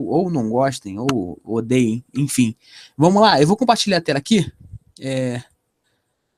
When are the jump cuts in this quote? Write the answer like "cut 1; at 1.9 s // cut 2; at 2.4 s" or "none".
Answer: none

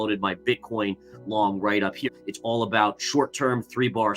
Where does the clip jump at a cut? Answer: cut 1; at 2.1 s

